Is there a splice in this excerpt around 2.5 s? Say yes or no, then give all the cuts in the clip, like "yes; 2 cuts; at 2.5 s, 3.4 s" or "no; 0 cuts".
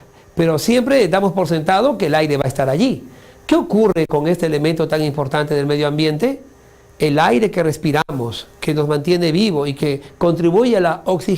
no; 1 cut; at 3.8 s